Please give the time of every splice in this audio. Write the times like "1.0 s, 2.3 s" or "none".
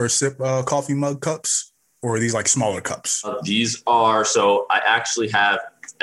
3.4 s